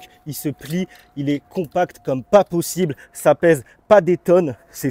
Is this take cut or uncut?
uncut